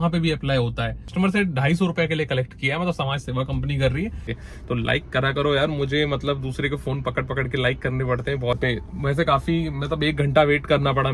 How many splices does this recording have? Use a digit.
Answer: 3